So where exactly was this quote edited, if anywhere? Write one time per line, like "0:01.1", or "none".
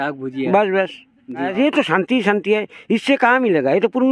0:01.5